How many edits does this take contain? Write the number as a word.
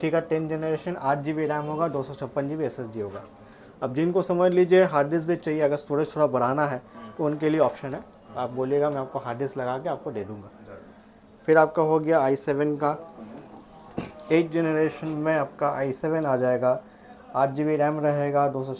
zero